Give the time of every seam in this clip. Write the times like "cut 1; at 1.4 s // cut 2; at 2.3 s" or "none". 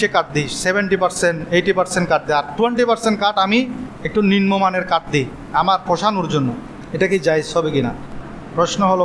cut 1; at 5.4 s // cut 2; at 8.0 s